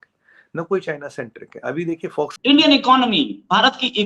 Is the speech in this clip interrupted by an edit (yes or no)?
yes